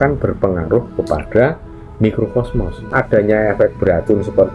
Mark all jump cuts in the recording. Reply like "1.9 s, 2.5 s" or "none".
2.8 s

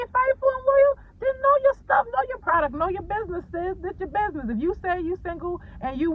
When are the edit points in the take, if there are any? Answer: none

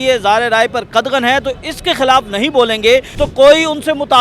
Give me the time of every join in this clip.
3.1 s

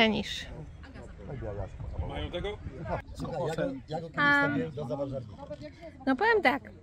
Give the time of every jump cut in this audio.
3.1 s

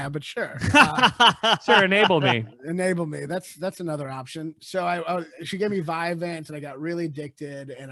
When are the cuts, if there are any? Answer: none

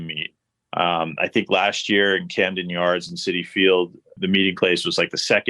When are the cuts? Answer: 4.2 s

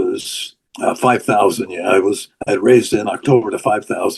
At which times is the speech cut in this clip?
2.3 s

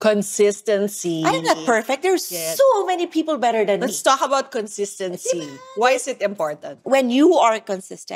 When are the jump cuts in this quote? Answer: 6.8 s

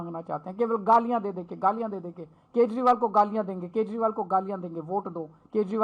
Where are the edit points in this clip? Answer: none

